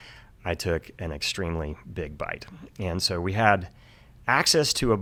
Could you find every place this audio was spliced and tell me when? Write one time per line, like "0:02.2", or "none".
none